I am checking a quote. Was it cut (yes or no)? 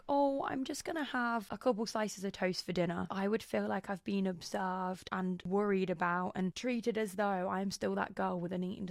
yes